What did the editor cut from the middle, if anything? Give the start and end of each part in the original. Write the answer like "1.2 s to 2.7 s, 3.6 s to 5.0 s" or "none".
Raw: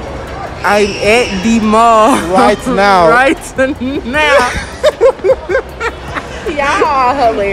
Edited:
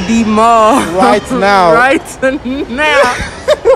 none